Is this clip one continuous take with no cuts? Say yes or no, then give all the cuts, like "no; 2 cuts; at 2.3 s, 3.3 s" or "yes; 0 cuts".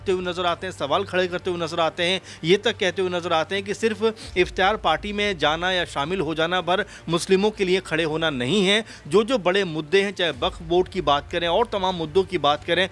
yes; 0 cuts